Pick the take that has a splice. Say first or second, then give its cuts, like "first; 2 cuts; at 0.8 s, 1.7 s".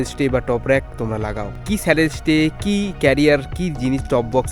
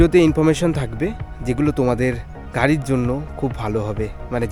first; 1 cut; at 1.4 s